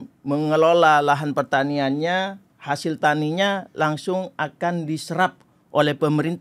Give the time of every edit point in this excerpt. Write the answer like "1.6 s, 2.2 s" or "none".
none

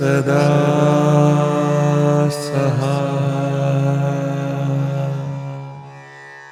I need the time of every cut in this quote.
none

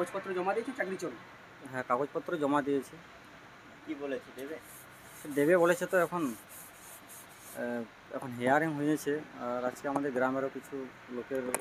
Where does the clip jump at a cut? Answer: none

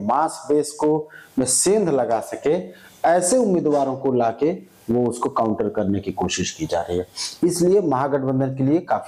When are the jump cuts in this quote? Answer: none

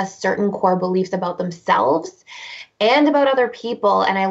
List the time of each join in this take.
none

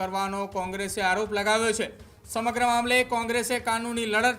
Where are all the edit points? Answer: none

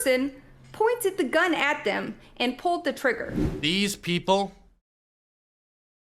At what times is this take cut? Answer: 3.3 s

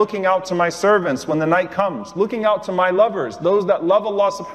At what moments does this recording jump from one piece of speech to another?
none

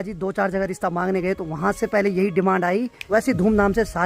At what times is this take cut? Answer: 3.0 s

